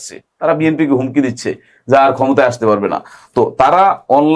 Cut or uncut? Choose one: uncut